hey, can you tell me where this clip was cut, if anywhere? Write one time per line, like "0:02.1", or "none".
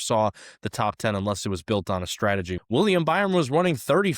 0:02.6